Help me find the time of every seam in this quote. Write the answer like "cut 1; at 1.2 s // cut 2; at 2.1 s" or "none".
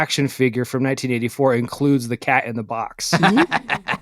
cut 1; at 2.9 s

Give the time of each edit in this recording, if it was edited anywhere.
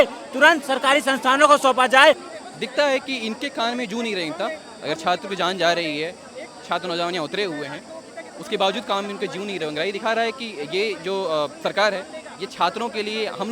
cut 1; at 2.2 s

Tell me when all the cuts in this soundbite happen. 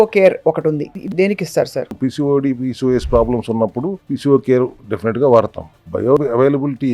cut 1; at 1.1 s // cut 2; at 1.9 s // cut 3; at 4.0 s // cut 4; at 4.9 s // cut 5; at 6.0 s

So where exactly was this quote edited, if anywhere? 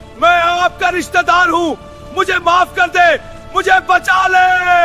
none

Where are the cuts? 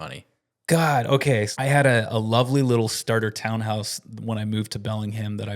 cut 1; at 1.5 s

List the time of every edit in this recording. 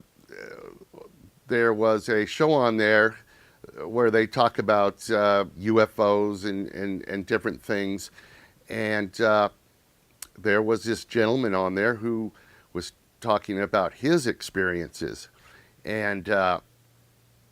cut 1; at 14.9 s

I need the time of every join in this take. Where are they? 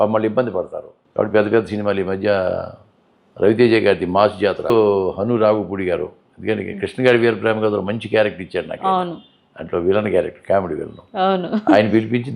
cut 1; at 1.0 s // cut 2; at 4.7 s

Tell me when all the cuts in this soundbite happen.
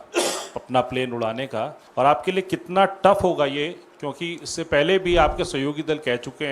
cut 1; at 1.8 s

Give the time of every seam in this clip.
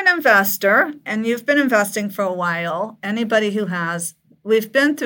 cut 1; at 1.0 s

